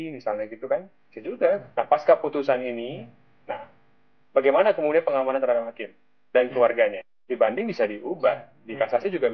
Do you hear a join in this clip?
yes; 2 cuts; at 1.7 s, 7.1 s

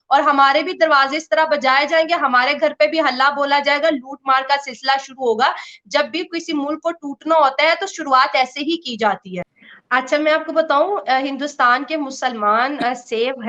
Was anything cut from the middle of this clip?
yes; 1 cut; at 9.5 s

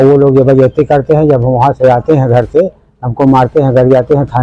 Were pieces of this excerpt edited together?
no; 0 cuts

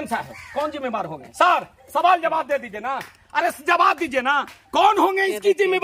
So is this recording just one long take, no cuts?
yes; 0 cuts

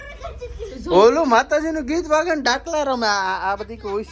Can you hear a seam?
no; 0 cuts

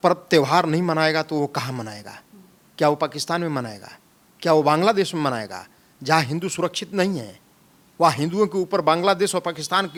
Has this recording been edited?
no; 0 cuts

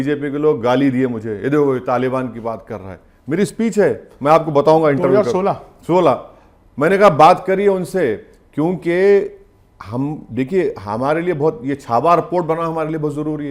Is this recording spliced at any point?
no; 0 cuts

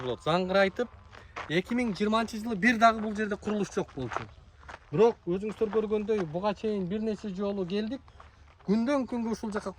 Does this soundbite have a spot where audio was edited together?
no; 0 cuts

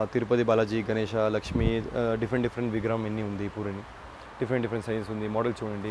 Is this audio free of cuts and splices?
yes; 0 cuts

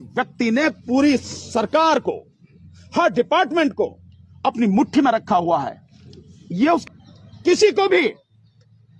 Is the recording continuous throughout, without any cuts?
no; 1 cut; at 6.8 s

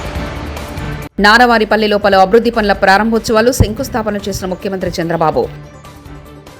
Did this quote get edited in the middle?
yes; 1 cut; at 1.0 s

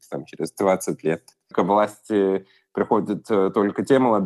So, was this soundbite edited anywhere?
no; 0 cuts

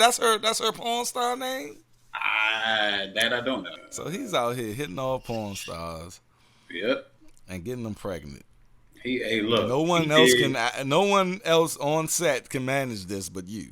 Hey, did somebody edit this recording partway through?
yes; 1 cut; at 3.7 s

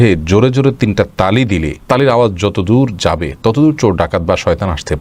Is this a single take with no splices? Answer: yes; 0 cuts

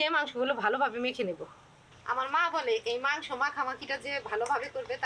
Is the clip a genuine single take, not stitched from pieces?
no; 1 cut; at 2.0 s

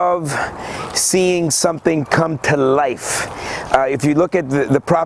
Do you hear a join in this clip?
no; 0 cuts

